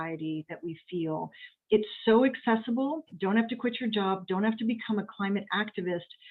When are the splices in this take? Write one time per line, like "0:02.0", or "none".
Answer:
0:03.1